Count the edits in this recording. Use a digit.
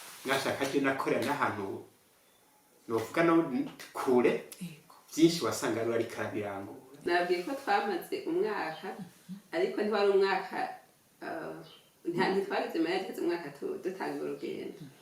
1